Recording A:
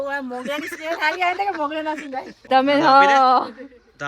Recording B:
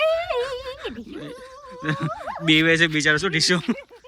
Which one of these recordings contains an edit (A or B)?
A